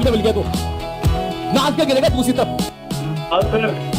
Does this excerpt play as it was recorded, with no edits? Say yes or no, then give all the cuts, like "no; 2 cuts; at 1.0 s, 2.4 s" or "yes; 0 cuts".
yes; 0 cuts